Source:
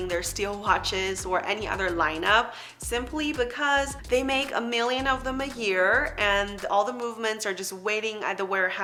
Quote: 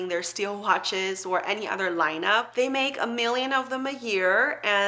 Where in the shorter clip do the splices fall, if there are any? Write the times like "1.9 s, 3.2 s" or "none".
2.5 s